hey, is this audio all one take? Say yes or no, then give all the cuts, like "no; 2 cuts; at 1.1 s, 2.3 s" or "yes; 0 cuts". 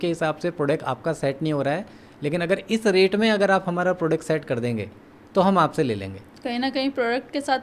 yes; 0 cuts